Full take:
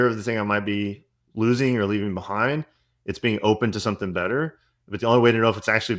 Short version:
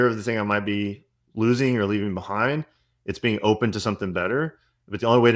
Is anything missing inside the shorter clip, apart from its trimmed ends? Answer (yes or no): no